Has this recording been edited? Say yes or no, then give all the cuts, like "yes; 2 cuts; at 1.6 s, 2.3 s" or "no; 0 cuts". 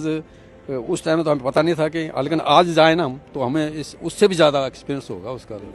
no; 0 cuts